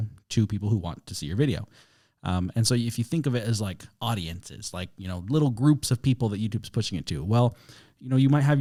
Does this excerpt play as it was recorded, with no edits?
yes; 0 cuts

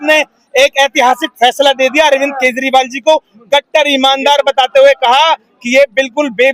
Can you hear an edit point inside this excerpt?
no; 0 cuts

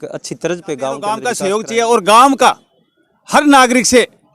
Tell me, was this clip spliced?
yes; 1 cut; at 1.2 s

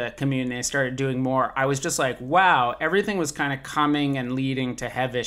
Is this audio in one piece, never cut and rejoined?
yes; 0 cuts

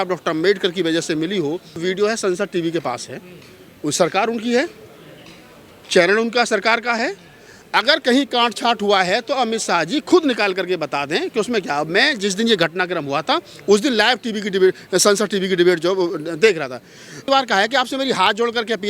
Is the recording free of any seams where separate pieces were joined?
no; 2 cuts; at 1.8 s, 17.3 s

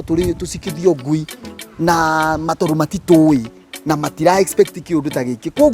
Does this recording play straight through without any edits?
yes; 0 cuts

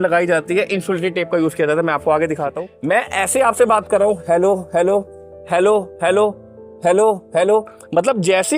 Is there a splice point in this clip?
yes; 1 cut; at 2.6 s

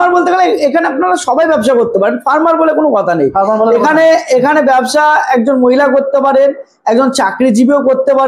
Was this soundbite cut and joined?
no; 0 cuts

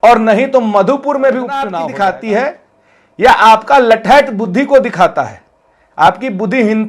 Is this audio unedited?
no; 1 cut; at 1.7 s

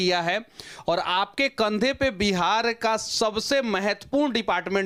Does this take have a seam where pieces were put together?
no; 0 cuts

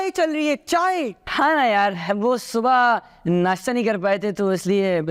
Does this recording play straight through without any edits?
yes; 0 cuts

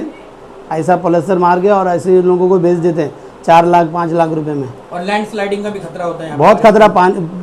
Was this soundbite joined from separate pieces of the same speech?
no; 0 cuts

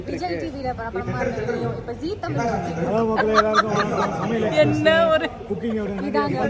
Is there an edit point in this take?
no; 0 cuts

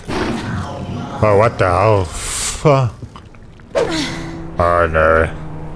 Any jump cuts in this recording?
yes; 1 cut; at 3.8 s

